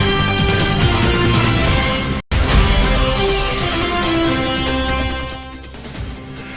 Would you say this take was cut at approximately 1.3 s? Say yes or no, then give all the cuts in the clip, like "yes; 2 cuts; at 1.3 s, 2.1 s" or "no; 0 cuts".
yes; 1 cut; at 1.3 s